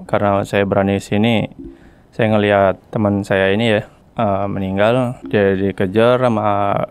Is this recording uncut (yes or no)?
no